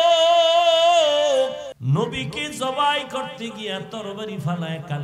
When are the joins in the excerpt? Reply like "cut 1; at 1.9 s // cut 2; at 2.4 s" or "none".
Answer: cut 1; at 1.7 s